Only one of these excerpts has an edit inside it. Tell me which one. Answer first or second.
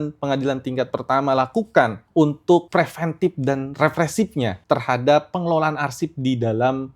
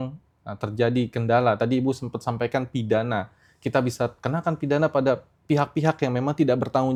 first